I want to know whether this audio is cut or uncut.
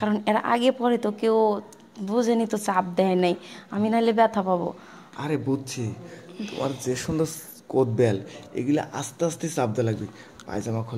uncut